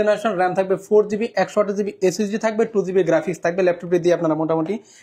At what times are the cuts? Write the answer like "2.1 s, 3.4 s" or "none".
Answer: none